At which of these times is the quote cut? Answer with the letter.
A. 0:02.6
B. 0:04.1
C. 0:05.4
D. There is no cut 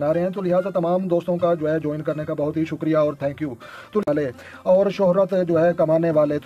B